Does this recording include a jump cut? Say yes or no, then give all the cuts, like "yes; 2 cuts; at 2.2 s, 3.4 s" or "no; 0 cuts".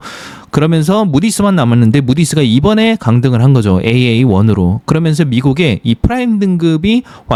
no; 0 cuts